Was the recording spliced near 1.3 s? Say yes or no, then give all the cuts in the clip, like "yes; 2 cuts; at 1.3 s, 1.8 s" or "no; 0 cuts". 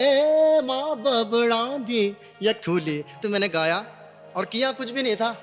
no; 1 cut; at 3.1 s